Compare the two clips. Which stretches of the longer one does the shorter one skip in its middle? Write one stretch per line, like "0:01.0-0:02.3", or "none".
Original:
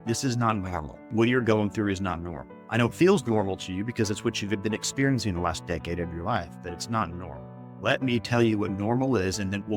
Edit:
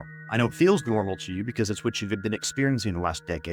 none